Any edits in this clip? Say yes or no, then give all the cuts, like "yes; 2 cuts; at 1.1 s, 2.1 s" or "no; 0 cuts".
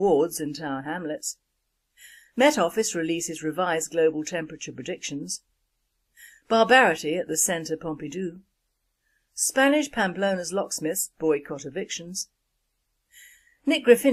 no; 0 cuts